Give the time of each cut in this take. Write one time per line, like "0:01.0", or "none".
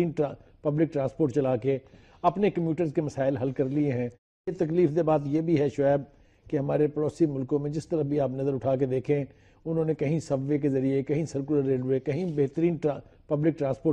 0:04.1